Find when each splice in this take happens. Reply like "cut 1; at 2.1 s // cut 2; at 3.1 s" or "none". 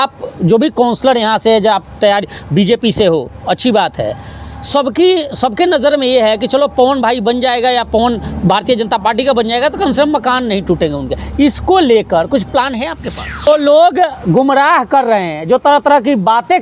cut 1; at 13.5 s